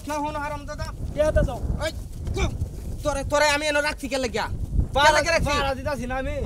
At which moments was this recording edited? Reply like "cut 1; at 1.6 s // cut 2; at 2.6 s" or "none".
none